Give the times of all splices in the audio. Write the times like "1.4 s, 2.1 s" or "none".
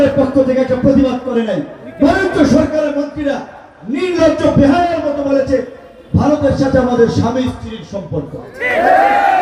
none

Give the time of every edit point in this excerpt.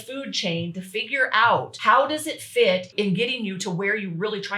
1.7 s, 2.9 s

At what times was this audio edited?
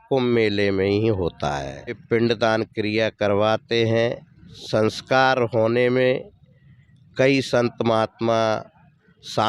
2.0 s, 4.5 s

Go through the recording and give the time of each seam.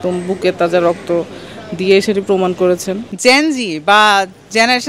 3.0 s

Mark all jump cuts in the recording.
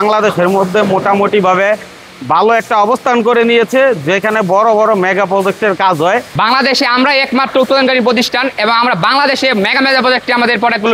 6.3 s

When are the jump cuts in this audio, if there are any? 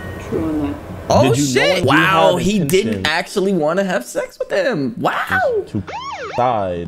1.8 s

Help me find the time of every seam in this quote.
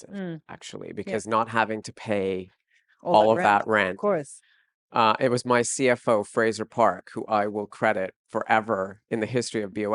9.0 s

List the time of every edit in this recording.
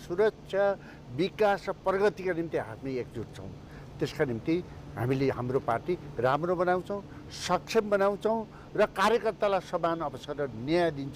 none

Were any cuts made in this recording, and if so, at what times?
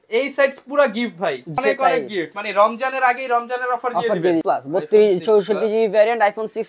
1.6 s, 4.4 s

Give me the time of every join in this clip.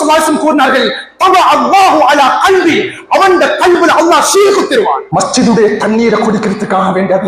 5.0 s

